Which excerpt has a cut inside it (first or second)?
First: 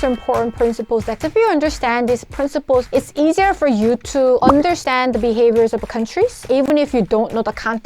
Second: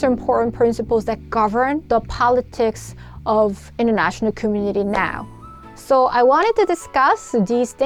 first